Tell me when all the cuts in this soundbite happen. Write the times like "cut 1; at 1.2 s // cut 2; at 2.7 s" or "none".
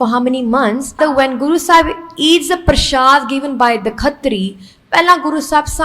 cut 1; at 1.0 s